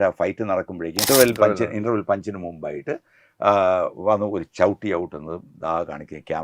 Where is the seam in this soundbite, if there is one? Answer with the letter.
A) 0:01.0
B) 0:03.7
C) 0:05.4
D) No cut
A